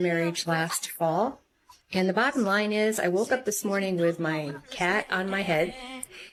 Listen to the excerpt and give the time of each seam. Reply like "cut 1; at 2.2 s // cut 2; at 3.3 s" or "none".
none